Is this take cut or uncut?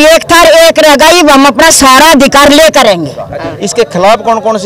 cut